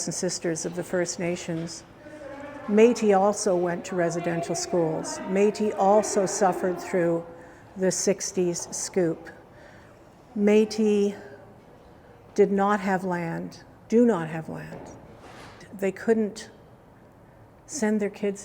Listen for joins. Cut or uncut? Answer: cut